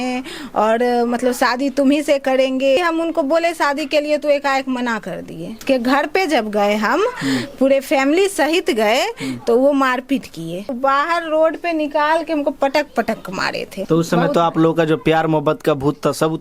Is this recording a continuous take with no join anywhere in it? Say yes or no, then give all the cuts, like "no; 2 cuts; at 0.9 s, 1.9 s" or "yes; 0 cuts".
no; 4 cuts; at 2.8 s, 5.6 s, 10.7 s, 13.7 s